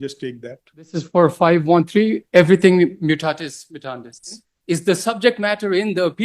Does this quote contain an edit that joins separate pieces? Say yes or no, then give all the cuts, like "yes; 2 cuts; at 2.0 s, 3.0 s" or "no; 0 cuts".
yes; 2 cuts; at 0.9 s, 4.5 s